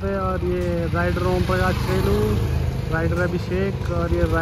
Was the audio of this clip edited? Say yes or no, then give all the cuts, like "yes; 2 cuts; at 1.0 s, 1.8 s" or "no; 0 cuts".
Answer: no; 0 cuts